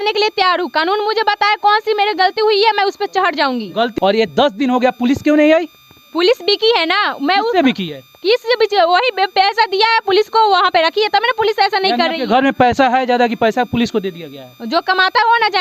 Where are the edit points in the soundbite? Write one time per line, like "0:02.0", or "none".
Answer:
0:03.9